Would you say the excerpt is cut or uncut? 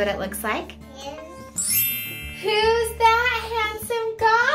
cut